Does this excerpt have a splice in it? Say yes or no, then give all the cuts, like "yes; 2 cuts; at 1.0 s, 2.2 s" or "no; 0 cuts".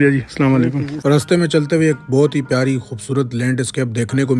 yes; 1 cut; at 0.9 s